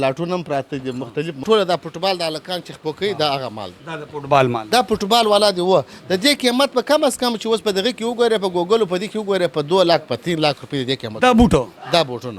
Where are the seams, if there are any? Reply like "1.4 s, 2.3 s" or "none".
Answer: 1.4 s